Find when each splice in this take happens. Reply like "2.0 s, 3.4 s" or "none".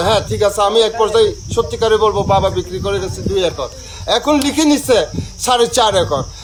none